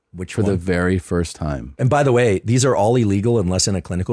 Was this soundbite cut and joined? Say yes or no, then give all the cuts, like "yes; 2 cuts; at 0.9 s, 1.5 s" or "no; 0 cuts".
yes; 1 cut; at 1.6 s